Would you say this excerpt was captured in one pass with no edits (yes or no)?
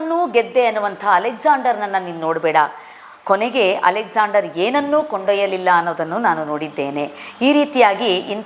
yes